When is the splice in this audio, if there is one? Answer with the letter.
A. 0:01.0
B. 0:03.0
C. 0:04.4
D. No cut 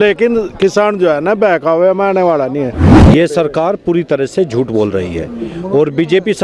B